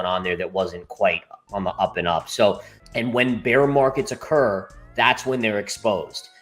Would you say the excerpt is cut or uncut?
cut